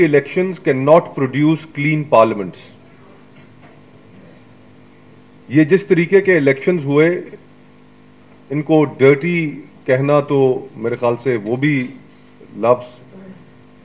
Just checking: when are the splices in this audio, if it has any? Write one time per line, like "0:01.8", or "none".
none